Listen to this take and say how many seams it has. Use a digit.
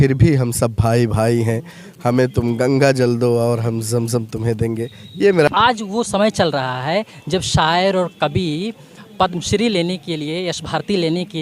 1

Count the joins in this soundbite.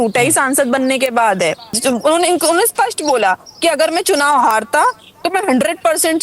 1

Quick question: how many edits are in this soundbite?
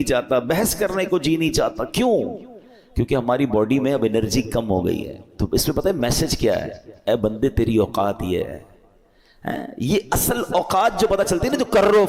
0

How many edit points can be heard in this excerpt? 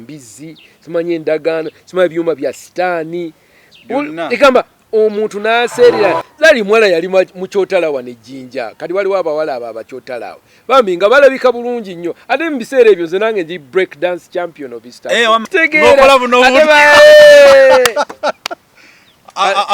2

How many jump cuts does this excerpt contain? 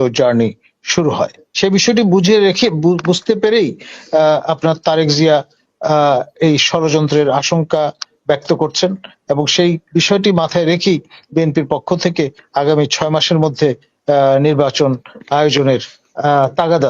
1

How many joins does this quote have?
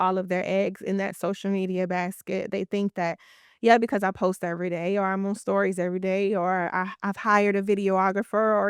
0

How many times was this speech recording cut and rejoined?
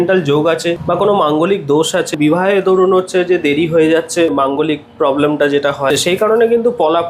4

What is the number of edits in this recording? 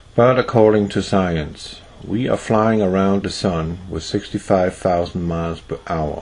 1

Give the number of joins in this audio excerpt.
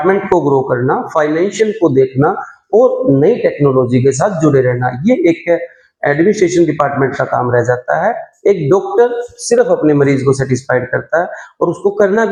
0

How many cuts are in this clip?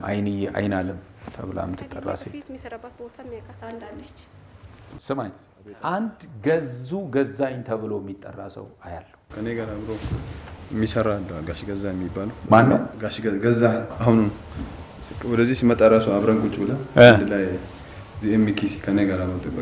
2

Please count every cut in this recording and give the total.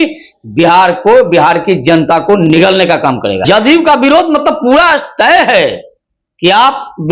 1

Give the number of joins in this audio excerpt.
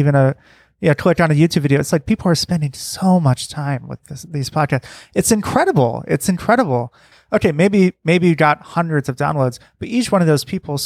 1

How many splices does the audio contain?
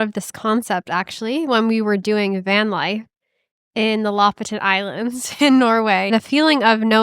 1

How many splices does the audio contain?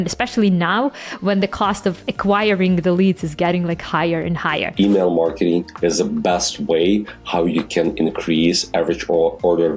2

